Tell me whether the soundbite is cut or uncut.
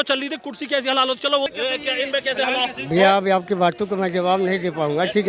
cut